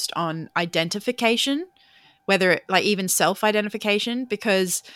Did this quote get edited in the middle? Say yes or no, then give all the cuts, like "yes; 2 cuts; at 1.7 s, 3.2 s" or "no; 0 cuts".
no; 0 cuts